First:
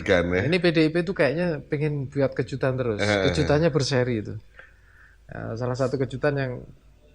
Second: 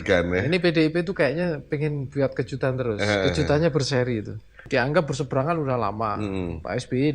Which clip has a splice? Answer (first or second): second